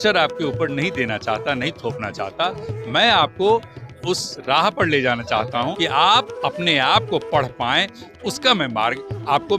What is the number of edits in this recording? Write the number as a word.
one